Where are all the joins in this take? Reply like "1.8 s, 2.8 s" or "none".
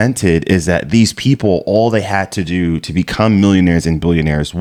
none